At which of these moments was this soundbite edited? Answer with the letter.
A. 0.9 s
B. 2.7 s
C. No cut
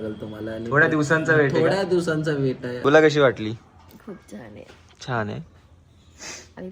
B